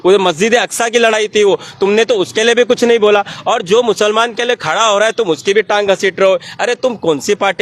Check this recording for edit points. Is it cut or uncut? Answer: uncut